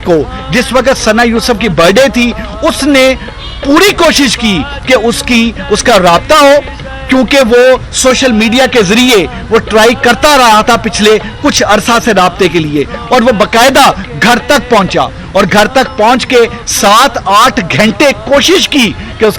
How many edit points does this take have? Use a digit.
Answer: 0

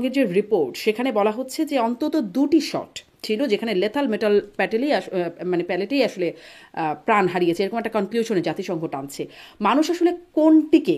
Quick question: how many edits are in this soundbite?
0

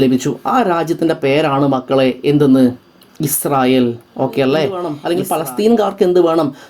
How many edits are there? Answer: 1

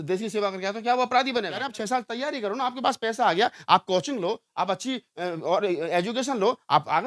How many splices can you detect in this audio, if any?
1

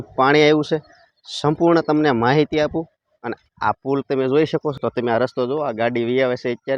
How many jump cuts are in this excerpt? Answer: 1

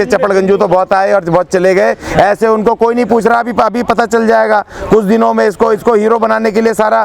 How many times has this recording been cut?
0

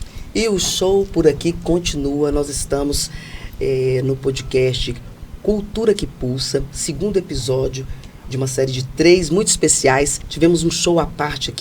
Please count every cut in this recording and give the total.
1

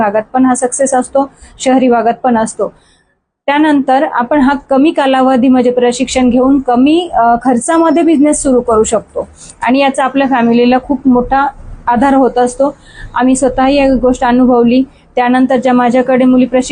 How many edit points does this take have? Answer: 0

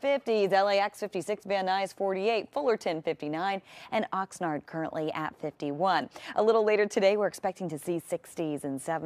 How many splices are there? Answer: 1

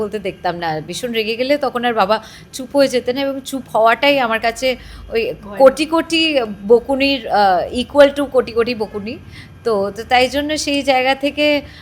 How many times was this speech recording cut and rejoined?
0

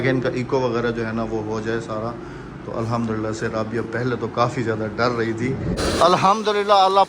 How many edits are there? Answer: 1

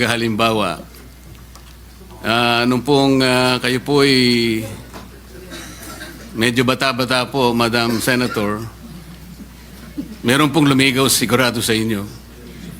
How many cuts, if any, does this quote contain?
0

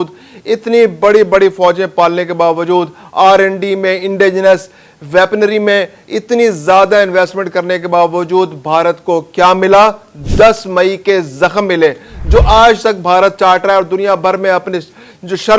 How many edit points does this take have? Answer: 0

